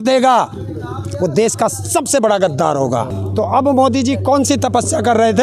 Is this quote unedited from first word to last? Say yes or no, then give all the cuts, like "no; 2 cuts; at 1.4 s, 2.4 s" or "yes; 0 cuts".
no; 1 cut; at 3.2 s